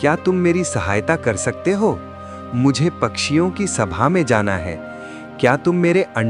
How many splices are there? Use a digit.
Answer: 0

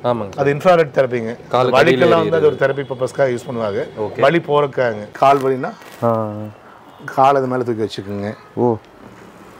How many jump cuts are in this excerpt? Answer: 1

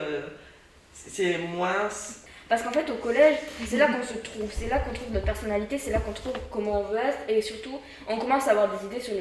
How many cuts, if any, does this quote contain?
0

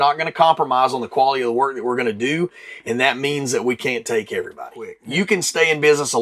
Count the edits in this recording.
1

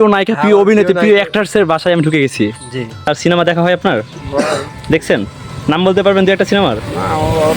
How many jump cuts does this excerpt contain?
1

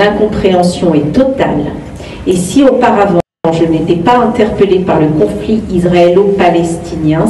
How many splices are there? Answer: 1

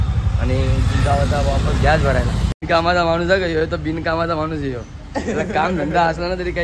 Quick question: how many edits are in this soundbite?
1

